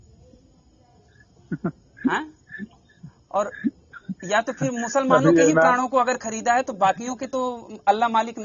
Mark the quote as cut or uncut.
uncut